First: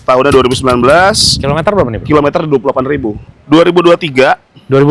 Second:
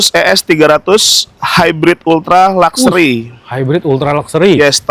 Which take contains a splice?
first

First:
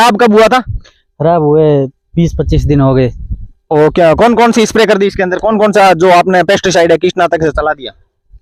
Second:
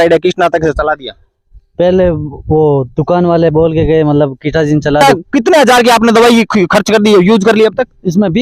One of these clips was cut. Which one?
second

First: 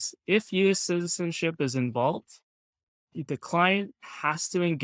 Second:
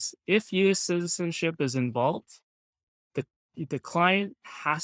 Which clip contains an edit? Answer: first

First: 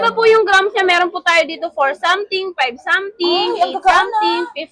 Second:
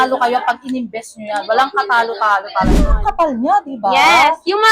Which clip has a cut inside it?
second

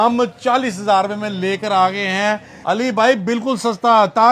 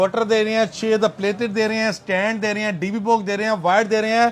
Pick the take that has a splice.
first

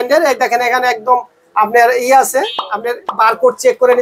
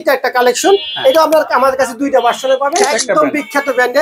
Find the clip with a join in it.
second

